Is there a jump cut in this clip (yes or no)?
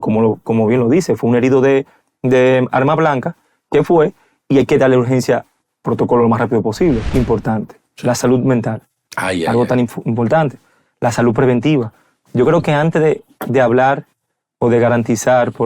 yes